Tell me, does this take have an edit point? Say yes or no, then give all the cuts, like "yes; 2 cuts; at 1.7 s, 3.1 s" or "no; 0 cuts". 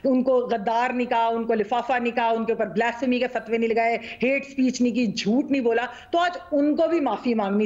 no; 0 cuts